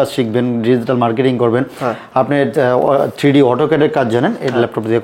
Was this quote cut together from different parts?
no; 0 cuts

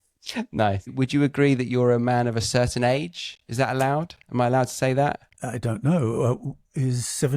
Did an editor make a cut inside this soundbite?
yes; 1 cut; at 0.9 s

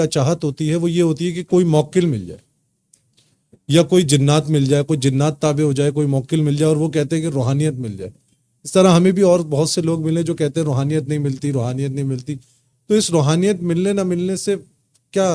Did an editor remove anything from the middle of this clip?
no; 0 cuts

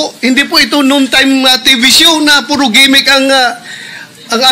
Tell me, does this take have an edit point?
no; 0 cuts

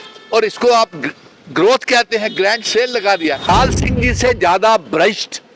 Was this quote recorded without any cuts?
no; 1 cut; at 3.5 s

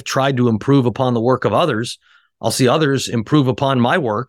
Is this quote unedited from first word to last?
yes; 0 cuts

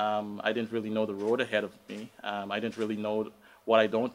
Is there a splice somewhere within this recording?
no; 0 cuts

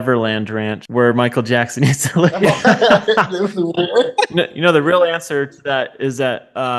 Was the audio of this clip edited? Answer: yes; 1 cut; at 2.4 s

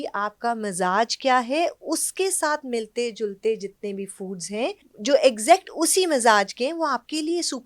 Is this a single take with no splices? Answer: no; 1 cut; at 4.9 s

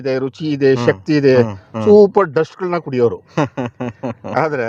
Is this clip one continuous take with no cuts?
yes; 0 cuts

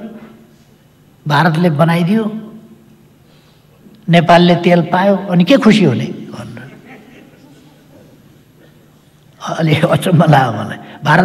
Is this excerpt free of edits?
yes; 0 cuts

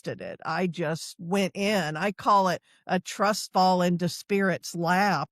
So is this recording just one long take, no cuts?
yes; 0 cuts

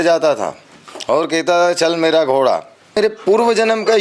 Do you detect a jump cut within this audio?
yes; 1 cut; at 3.0 s

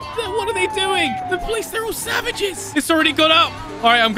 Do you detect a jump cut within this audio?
yes; 1 cut; at 2.6 s

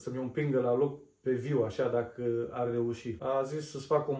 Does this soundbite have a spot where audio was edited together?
yes; 1 cut; at 3.1 s

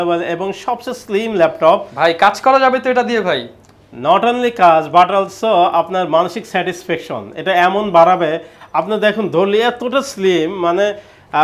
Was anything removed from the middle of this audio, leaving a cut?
no; 0 cuts

